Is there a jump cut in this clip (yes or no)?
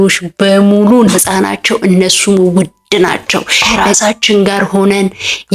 yes